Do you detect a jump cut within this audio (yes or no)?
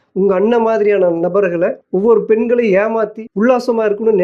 yes